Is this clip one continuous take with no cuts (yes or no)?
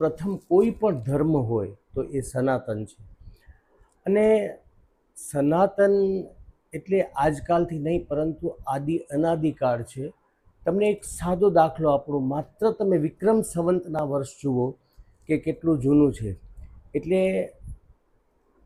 yes